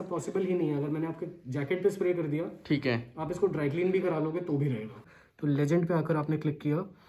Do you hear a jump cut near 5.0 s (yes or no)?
yes